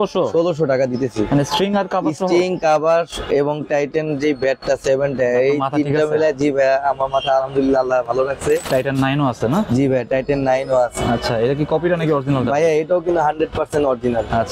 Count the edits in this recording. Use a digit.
1